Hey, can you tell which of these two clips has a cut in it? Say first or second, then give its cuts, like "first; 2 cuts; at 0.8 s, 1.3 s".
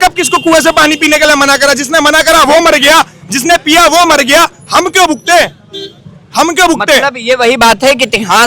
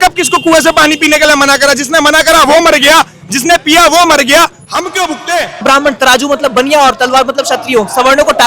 second; 1 cut; at 5.6 s